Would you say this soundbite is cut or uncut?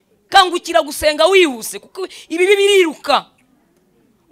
uncut